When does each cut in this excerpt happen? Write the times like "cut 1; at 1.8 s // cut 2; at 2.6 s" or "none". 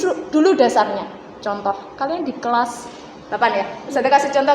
none